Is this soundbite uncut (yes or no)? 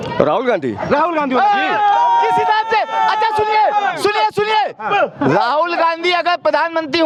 yes